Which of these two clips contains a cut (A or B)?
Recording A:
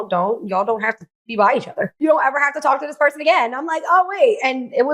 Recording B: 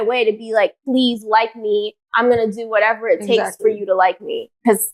A